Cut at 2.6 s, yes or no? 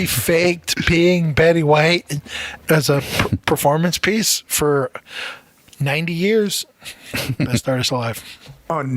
yes